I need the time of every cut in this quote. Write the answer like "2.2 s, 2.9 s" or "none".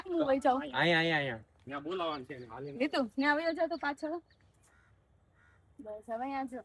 none